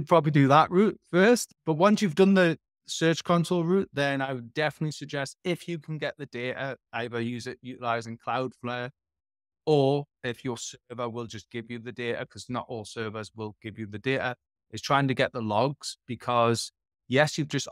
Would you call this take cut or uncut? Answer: cut